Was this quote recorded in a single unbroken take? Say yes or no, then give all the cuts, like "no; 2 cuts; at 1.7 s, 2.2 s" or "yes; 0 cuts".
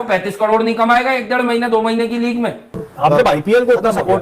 no; 1 cut; at 2.9 s